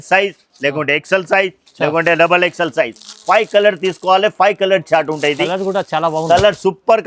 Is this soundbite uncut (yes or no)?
yes